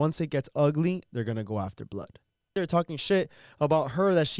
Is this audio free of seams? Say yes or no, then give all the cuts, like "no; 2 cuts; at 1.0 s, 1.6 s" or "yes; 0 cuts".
no; 1 cut; at 2.5 s